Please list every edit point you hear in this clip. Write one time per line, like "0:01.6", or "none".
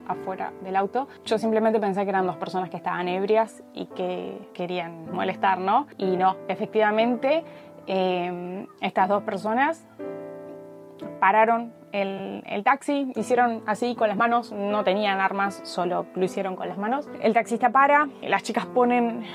none